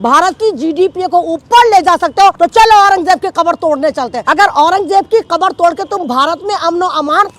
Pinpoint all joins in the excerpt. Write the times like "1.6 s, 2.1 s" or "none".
2.3 s, 4.2 s